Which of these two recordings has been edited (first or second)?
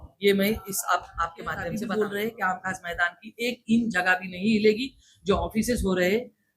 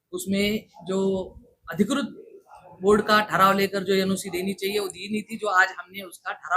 first